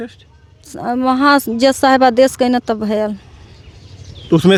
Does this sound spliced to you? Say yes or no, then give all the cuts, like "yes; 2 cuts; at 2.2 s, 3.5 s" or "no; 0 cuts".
no; 0 cuts